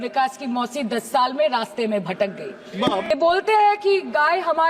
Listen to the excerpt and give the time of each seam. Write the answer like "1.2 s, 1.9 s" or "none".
3.1 s